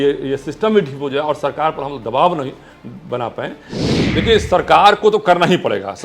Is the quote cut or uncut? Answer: cut